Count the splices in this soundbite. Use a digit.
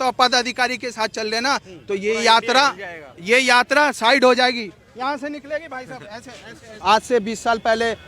1